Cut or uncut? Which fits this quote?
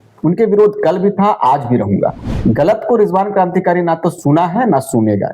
cut